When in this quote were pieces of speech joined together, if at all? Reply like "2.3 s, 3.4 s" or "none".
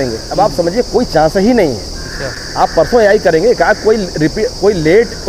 none